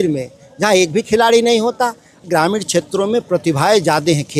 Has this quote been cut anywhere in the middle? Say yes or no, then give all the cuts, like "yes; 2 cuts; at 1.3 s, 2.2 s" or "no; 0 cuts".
yes; 1 cut; at 2.3 s